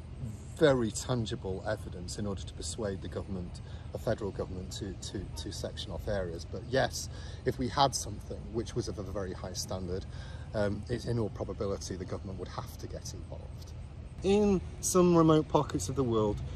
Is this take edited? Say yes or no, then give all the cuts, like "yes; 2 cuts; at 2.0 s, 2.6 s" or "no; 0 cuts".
yes; 1 cut; at 14.2 s